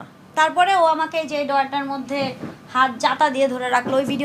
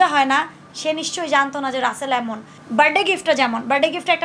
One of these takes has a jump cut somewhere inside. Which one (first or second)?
second